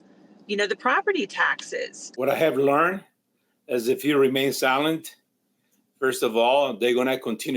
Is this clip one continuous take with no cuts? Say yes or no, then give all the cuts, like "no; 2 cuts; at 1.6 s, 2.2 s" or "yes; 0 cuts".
no; 1 cut; at 2.0 s